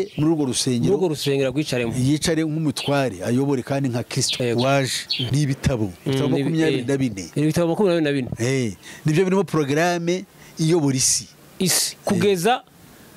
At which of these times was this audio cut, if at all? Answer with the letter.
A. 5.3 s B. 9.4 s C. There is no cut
A